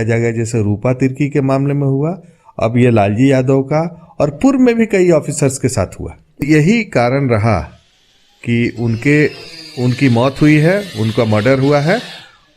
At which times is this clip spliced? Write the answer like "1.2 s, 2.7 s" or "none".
6.4 s

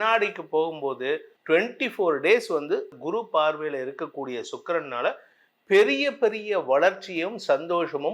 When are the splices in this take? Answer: 1.3 s, 2.9 s

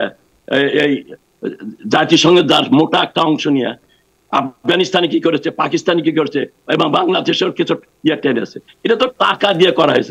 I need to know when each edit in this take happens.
none

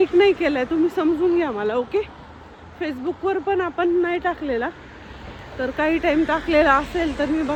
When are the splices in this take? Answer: none

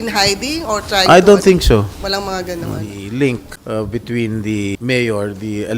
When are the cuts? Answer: 2.9 s, 3.5 s, 4.8 s

